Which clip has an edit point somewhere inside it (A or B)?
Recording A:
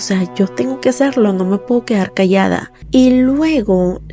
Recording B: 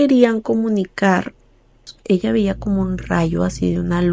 A